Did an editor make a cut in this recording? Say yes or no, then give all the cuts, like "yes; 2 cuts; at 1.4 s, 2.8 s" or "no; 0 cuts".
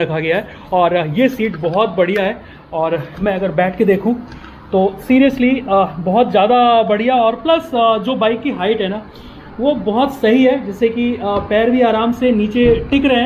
no; 0 cuts